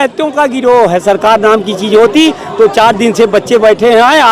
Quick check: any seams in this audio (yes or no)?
no